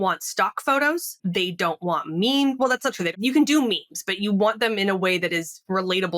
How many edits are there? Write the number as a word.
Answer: two